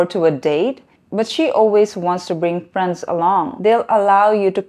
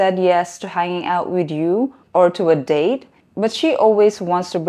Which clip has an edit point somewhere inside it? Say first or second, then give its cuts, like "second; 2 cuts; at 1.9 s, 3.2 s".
first; 1 cut; at 3.6 s